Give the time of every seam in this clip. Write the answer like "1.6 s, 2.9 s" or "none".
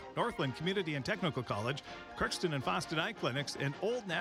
none